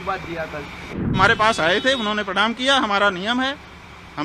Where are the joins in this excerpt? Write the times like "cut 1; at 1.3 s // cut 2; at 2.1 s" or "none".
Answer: cut 1; at 1.1 s